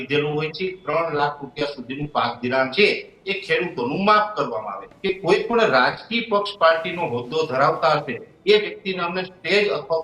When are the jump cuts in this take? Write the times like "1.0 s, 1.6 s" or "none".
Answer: 4.9 s